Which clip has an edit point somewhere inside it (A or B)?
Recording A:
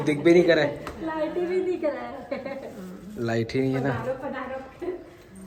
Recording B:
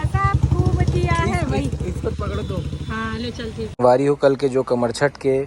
B